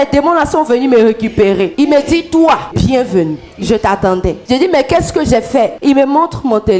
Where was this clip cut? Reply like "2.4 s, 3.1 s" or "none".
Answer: 1.7 s, 2.7 s, 4.4 s, 5.8 s